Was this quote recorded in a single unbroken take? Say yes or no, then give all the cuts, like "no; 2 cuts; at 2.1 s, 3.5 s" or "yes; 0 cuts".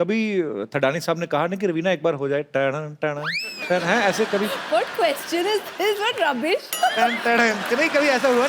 no; 2 cuts; at 3.5 s, 6.8 s